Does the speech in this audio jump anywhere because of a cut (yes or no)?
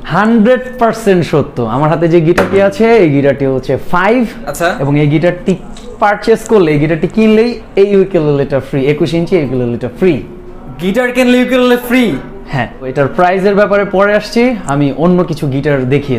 no